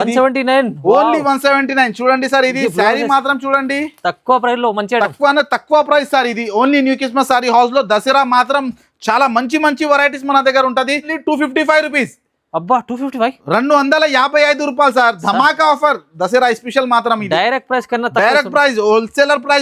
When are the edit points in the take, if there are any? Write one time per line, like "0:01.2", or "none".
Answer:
0:11.1